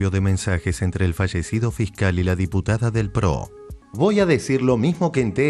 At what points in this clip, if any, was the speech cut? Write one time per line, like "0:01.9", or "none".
none